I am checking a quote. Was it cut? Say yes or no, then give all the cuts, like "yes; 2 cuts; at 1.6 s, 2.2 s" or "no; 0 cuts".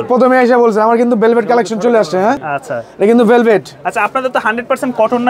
no; 0 cuts